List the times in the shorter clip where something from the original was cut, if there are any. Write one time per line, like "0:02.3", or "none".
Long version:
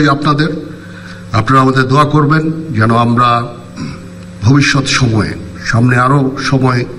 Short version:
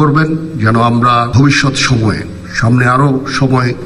0:01.3